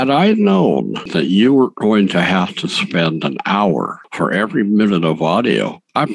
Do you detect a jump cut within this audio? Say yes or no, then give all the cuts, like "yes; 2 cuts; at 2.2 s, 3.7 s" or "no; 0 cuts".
yes; 1 cut; at 1.0 s